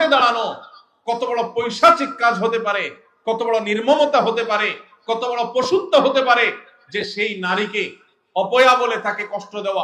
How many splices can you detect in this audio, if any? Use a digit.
0